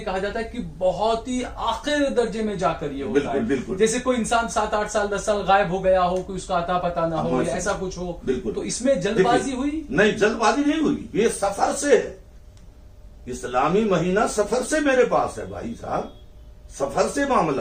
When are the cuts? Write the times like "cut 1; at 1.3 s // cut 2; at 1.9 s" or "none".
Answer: none